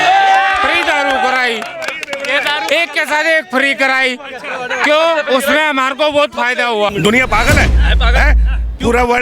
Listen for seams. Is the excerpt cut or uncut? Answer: cut